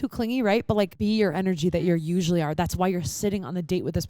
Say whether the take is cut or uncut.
cut